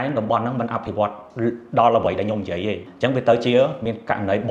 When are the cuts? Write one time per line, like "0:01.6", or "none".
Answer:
0:02.8